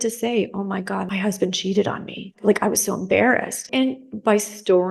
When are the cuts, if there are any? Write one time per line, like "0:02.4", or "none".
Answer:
0:01.1
0:02.4
0:03.6